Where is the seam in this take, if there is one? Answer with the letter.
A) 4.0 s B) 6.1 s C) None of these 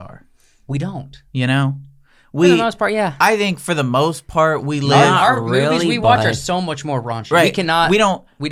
C